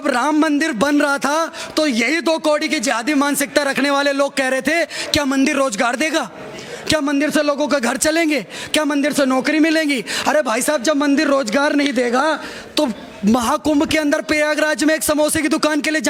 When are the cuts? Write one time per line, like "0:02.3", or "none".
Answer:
none